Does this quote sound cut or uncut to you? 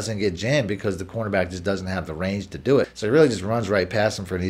cut